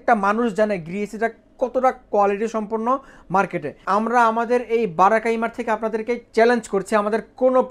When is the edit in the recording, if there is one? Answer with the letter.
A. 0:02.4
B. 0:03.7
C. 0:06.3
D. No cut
B